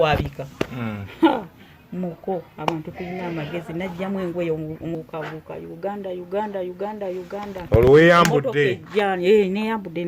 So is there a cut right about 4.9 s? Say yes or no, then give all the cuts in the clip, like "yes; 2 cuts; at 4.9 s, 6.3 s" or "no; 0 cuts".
yes; 1 cut; at 4.9 s